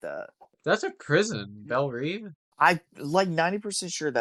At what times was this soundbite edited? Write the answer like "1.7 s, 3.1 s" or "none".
none